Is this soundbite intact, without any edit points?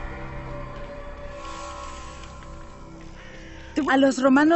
no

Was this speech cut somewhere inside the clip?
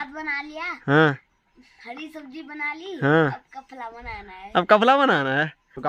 no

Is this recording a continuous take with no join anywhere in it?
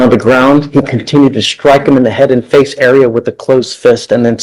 yes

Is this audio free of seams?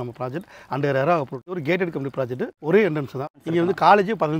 no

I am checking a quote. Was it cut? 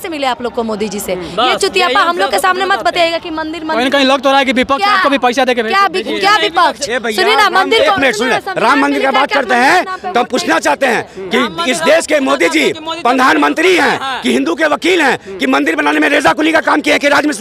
no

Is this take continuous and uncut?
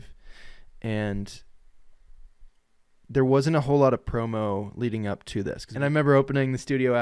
no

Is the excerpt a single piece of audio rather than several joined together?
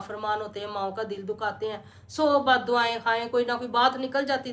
yes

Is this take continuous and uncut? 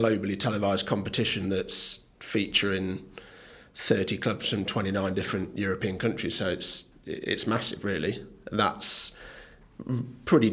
yes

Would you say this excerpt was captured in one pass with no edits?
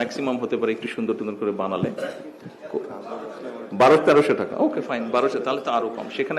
yes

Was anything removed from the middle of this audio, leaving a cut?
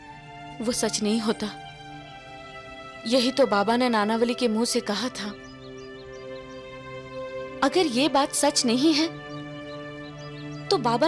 no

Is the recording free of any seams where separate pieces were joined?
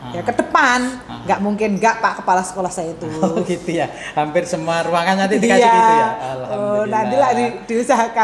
yes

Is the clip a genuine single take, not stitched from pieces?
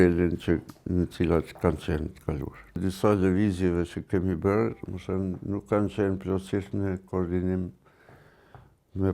no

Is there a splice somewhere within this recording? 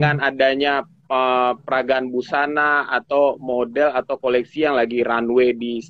no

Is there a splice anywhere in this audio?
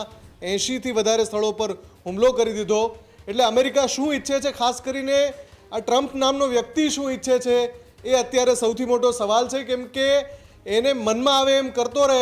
no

